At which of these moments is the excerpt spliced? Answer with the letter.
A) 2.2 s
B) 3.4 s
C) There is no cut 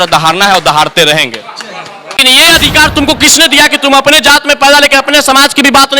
A